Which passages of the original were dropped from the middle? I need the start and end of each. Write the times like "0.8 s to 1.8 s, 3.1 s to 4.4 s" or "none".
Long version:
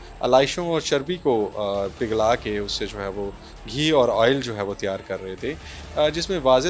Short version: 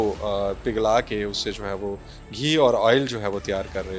none